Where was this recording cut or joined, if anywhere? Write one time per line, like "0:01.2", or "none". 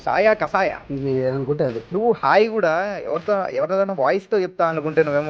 0:00.8
0:01.8